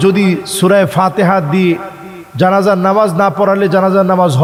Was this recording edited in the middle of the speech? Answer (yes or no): no